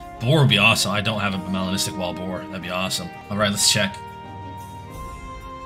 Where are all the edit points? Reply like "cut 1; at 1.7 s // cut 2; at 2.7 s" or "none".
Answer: cut 1; at 3.2 s